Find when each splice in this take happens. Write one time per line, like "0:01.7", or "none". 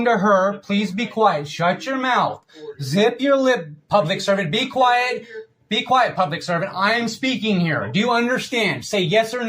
none

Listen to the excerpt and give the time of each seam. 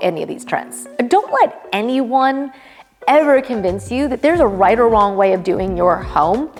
none

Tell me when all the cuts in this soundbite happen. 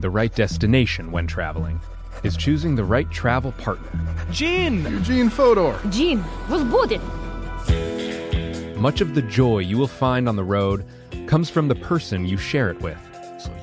none

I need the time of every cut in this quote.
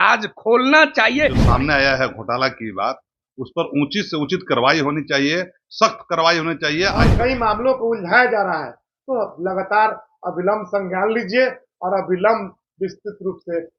0:01.4
0:07.0

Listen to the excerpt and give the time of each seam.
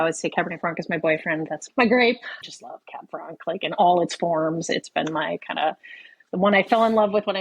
none

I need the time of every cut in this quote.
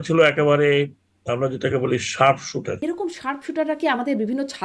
0:02.8

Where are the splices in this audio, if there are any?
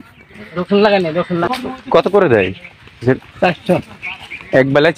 0:01.5

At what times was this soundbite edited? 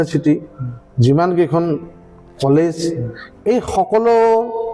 none

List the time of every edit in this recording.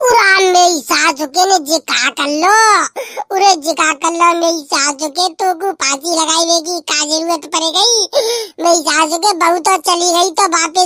none

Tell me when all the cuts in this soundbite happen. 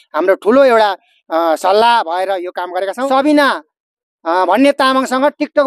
0:03.1

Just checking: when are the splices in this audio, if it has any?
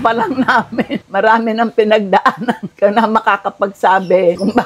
0:01.0
0:02.7

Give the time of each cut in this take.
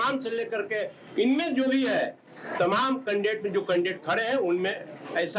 none

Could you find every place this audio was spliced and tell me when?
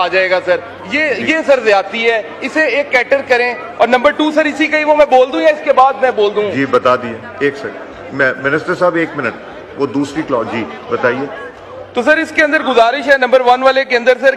none

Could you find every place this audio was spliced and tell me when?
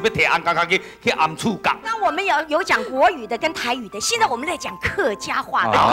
0:01.9

